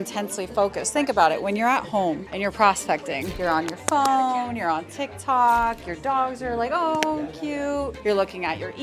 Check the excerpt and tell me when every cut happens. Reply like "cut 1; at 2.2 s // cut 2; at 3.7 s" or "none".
cut 1; at 2.3 s // cut 2; at 3.3 s // cut 3; at 7.9 s